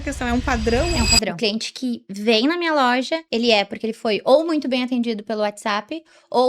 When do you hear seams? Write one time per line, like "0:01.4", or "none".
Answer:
0:01.3
0:03.2